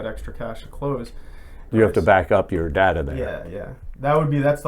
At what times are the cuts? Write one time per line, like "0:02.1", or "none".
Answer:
0:01.6